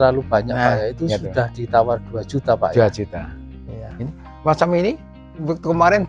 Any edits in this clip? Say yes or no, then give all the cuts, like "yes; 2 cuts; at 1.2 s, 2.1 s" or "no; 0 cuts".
no; 0 cuts